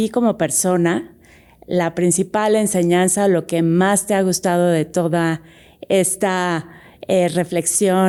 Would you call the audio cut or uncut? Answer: uncut